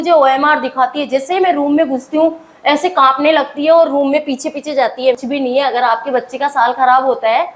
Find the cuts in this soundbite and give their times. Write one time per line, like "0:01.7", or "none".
0:05.2